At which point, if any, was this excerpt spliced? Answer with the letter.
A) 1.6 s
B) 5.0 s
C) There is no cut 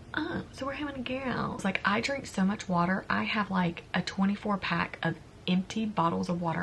A